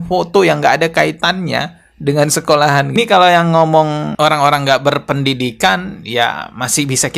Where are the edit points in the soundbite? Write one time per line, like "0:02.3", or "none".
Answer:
0:02.9